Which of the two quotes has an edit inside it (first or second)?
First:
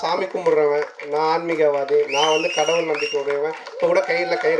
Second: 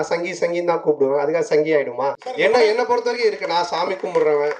second